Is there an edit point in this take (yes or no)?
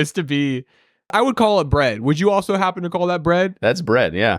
yes